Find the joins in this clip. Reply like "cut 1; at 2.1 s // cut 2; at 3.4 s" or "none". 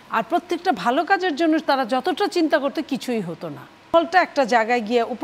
cut 1; at 3.9 s